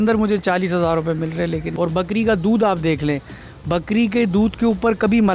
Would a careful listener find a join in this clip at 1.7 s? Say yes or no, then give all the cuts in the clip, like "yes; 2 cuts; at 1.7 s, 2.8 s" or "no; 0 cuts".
yes; 1 cut; at 1.7 s